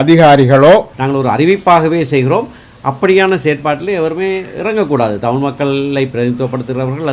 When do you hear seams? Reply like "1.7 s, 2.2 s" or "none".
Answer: 1.0 s